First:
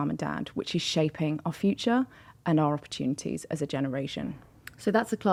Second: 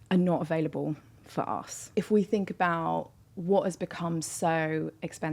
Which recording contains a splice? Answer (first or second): second